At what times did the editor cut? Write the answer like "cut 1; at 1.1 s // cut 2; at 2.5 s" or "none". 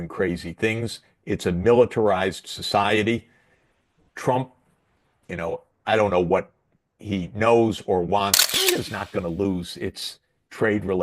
cut 1; at 8.4 s